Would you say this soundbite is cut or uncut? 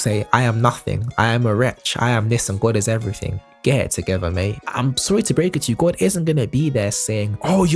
cut